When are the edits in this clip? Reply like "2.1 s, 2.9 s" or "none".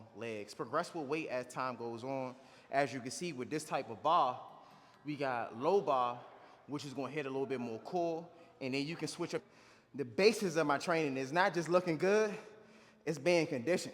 9.5 s